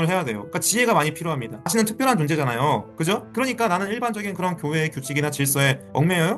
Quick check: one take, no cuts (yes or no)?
no